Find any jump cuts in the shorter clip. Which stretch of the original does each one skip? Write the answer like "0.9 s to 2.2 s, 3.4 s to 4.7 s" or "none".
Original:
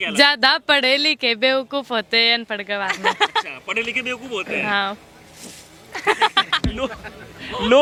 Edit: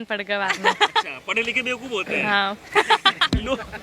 5.0 s to 5.9 s

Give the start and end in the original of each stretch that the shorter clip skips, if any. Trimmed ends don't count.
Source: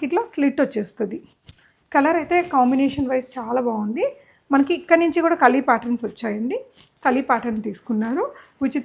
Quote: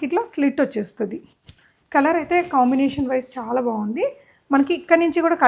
none

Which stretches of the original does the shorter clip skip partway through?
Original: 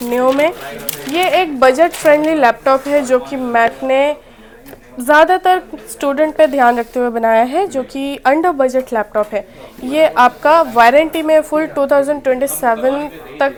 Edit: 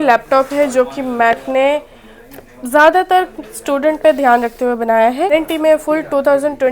7.6 s to 10.9 s

